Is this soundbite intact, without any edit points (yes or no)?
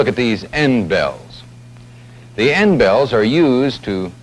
no